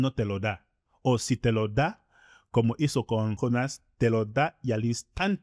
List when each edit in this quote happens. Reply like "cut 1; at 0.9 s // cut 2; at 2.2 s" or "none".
cut 1; at 3.4 s

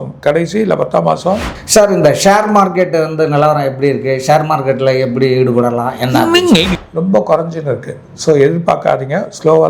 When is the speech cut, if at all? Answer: cut 1; at 1.5 s // cut 2; at 6.8 s

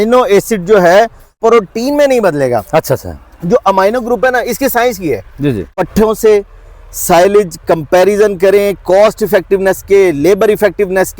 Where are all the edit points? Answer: cut 1; at 1.4 s // cut 2; at 5.8 s

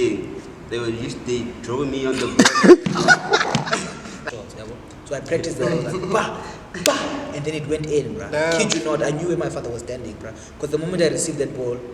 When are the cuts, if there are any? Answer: cut 1; at 4.2 s

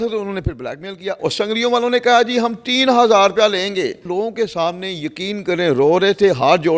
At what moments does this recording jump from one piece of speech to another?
cut 1; at 1.2 s // cut 2; at 4.1 s

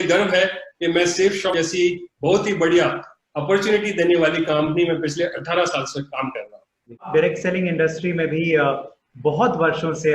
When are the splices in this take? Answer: cut 1; at 1.5 s // cut 2; at 7.1 s

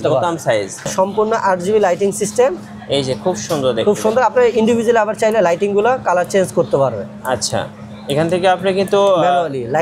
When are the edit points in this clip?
cut 1; at 0.9 s

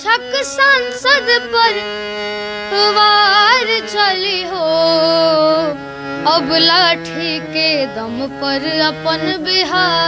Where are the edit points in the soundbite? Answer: none

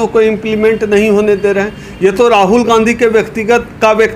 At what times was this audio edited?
none

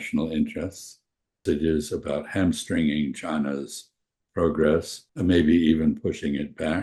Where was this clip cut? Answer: cut 1; at 1.4 s // cut 2; at 5.0 s

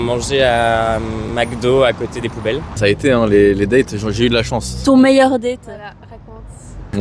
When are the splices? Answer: none

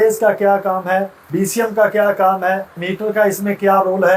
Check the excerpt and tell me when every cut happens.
cut 1; at 1.2 s // cut 2; at 2.9 s

